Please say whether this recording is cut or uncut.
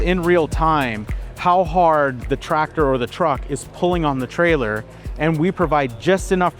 uncut